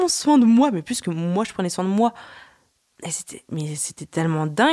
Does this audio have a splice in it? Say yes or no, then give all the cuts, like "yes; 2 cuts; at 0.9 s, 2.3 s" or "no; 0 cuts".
no; 0 cuts